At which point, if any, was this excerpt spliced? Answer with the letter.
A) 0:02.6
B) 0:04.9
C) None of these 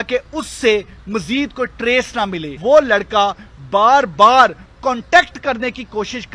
A